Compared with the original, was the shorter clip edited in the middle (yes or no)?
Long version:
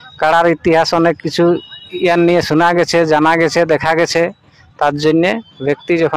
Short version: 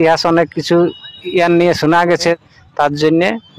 yes